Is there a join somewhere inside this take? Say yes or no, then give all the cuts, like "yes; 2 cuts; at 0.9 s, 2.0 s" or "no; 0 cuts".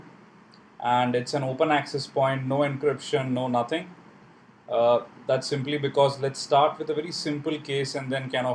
yes; 1 cut; at 2.7 s